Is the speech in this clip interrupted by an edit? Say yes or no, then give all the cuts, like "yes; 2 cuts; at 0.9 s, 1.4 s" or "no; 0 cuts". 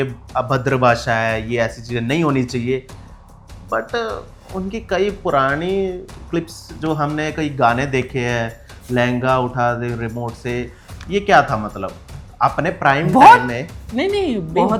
no; 0 cuts